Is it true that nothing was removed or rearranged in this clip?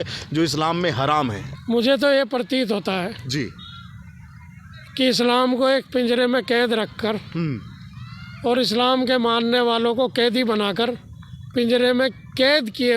no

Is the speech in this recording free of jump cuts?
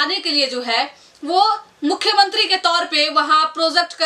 yes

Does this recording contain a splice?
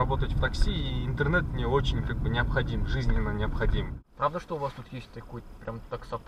yes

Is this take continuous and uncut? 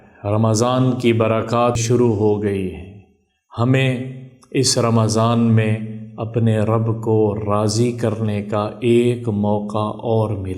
no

